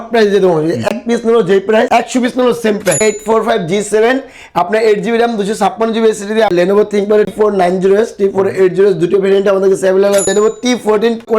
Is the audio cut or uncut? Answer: cut